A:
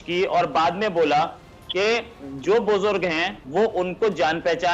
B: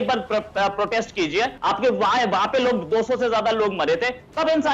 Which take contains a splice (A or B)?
B